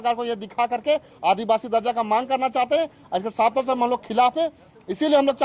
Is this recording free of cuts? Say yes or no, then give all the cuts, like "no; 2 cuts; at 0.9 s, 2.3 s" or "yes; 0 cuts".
yes; 0 cuts